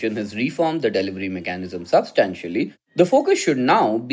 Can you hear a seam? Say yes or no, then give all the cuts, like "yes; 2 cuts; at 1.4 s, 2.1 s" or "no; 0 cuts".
yes; 1 cut; at 2.8 s